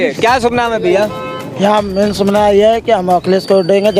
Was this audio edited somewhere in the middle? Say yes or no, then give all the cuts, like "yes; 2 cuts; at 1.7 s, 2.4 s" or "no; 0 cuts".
no; 0 cuts